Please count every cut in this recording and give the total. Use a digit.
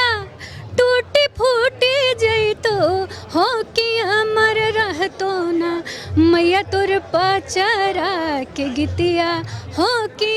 0